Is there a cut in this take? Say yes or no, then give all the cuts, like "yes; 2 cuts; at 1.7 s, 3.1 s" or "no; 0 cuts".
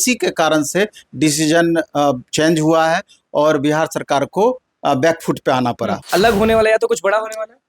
yes; 1 cut; at 6.0 s